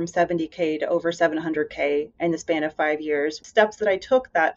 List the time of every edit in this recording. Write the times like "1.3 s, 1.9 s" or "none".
3.4 s